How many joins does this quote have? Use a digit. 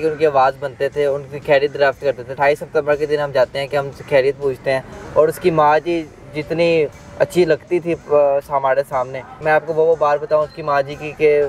3